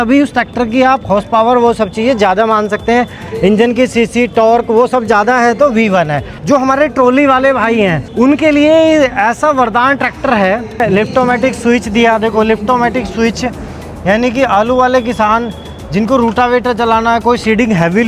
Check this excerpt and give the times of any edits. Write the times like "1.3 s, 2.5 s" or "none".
6.4 s, 10.7 s